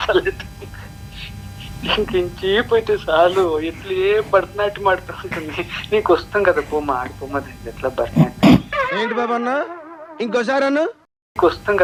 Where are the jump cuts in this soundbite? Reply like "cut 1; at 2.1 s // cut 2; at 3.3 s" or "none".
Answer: none